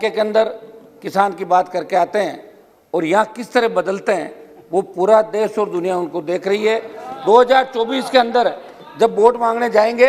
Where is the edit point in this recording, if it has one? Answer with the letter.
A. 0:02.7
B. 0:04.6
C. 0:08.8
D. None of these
D